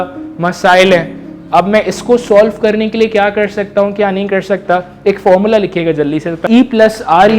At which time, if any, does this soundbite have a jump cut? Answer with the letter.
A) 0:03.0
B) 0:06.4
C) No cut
B